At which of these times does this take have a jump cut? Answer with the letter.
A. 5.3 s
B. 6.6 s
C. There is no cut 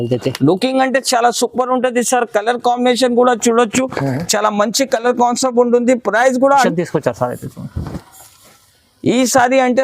B